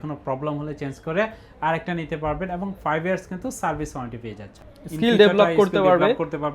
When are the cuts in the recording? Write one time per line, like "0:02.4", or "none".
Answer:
0:04.5